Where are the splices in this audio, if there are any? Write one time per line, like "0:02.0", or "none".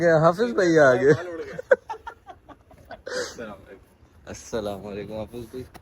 0:01.7